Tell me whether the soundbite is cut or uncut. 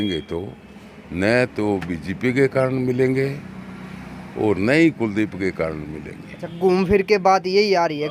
uncut